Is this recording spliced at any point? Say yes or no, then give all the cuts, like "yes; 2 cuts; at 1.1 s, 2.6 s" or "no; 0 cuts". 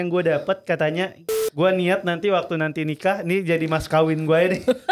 yes; 1 cut; at 1.2 s